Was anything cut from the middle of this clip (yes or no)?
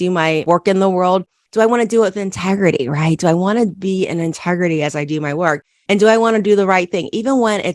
no